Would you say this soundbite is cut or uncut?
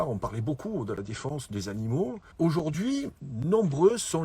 cut